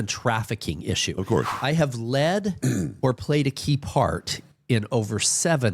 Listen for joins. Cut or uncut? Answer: cut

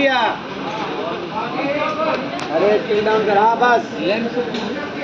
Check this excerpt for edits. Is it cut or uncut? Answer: uncut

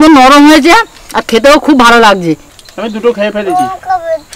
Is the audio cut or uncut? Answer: uncut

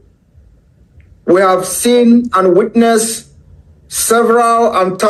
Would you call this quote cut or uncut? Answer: uncut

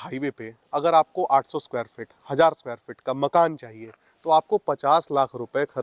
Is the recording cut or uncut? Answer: uncut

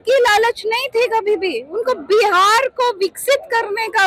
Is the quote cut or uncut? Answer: uncut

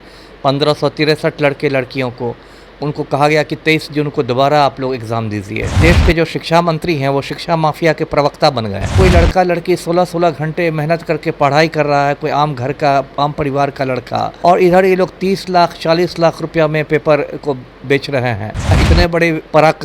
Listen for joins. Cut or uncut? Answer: cut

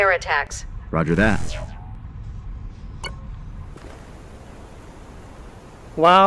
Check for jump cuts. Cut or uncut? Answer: cut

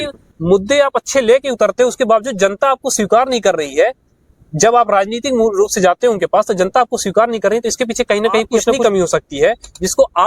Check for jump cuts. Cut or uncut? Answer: cut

